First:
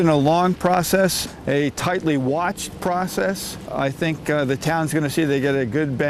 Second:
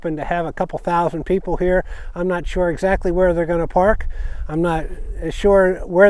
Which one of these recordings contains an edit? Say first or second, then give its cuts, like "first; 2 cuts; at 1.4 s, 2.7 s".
first; 2 cuts; at 1.3 s, 3.7 s